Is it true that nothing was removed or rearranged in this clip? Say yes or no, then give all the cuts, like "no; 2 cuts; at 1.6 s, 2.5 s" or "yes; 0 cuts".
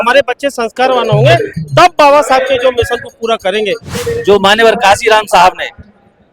no; 1 cut; at 3.9 s